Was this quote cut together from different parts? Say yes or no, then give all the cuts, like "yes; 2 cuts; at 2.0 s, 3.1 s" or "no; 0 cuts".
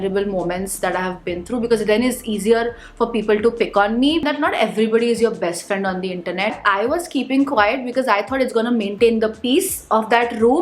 yes; 2 cuts; at 4.3 s, 6.5 s